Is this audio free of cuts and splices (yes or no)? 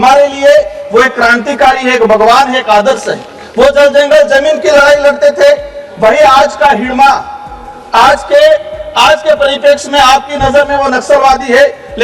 yes